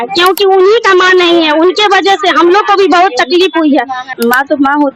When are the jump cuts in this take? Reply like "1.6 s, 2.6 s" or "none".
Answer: 4.1 s